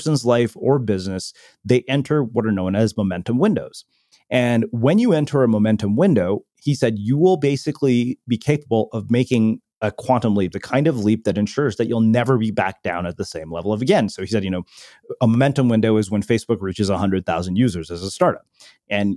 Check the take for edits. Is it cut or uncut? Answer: uncut